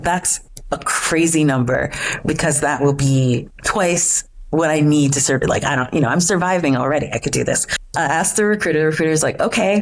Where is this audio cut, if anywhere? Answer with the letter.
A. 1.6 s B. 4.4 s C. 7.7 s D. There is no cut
C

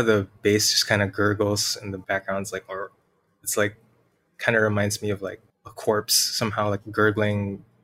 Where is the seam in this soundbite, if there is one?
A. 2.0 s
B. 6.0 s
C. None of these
A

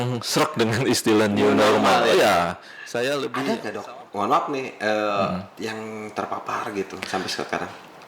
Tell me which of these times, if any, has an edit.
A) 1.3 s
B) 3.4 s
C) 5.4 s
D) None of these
B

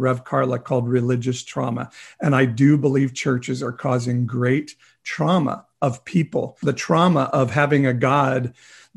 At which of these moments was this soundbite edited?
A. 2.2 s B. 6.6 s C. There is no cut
B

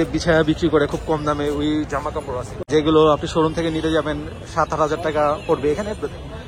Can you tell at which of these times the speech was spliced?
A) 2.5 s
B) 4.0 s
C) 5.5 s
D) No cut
A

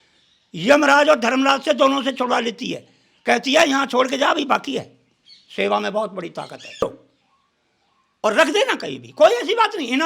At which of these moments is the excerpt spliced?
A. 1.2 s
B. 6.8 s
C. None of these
B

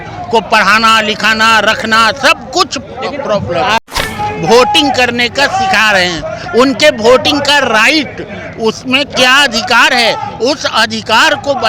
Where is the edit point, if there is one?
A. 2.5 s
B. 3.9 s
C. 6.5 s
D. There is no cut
B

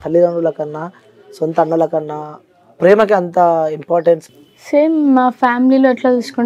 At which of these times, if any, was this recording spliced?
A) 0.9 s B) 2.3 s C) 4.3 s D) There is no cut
C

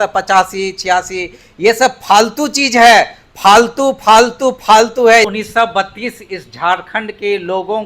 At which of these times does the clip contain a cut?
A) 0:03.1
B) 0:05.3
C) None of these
B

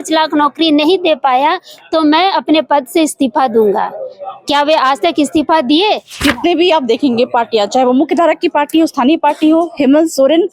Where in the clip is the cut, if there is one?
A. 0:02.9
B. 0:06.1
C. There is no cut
B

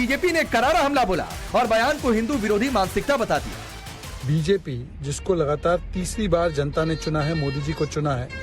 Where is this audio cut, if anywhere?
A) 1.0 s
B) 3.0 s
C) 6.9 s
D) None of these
D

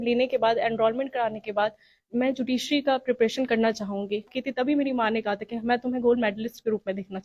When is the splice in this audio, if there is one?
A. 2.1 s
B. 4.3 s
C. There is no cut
B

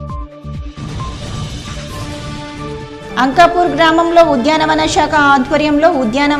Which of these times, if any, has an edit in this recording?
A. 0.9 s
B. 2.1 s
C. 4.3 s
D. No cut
B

